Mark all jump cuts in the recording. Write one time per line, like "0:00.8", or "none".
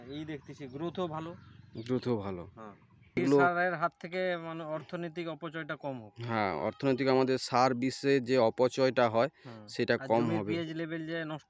0:03.1

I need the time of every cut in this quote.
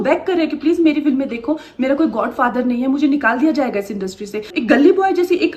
0:04.4

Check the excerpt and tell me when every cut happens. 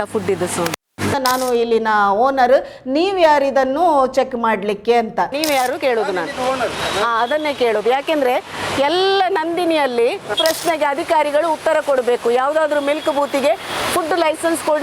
0:01.1
0:10.4

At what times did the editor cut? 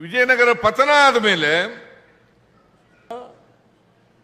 0:03.1

